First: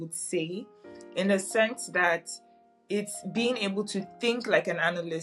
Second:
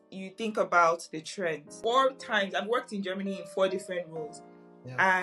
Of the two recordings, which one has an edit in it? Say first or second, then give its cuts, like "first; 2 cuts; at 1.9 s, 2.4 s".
second; 1 cut; at 1.8 s